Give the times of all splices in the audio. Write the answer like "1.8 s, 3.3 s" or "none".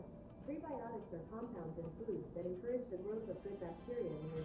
none